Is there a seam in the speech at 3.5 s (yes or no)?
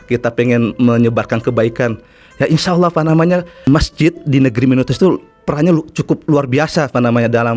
yes